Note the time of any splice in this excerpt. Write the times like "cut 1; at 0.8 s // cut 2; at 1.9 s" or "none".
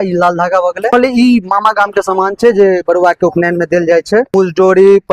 cut 1; at 0.9 s // cut 2; at 4.3 s